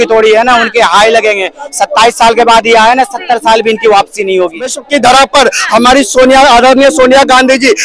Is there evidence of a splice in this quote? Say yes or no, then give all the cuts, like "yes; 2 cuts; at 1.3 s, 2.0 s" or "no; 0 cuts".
yes; 1 cut; at 4.8 s